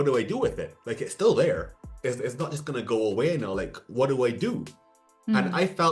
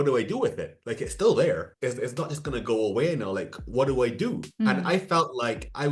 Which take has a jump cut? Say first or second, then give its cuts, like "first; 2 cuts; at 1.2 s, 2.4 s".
second; 2 cuts; at 1.7 s, 4.5 s